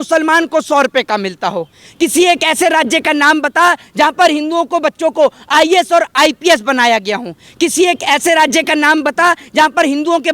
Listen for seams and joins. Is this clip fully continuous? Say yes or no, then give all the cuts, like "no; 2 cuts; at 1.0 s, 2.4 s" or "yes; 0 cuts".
yes; 0 cuts